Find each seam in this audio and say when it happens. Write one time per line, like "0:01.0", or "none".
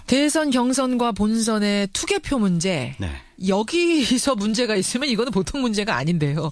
0:05.5